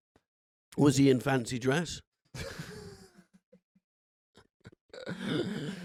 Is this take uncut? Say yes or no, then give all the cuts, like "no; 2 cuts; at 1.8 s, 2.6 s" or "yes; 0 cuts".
yes; 0 cuts